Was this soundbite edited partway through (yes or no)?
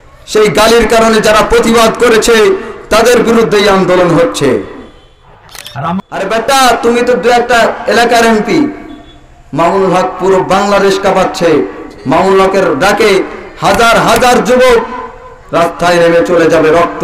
yes